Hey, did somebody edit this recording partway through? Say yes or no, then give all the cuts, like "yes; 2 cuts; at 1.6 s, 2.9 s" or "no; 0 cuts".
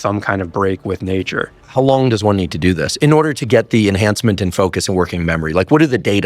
yes; 1 cut; at 1.6 s